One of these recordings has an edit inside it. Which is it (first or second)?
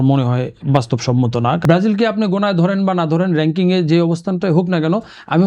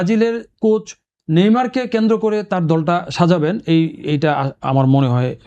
first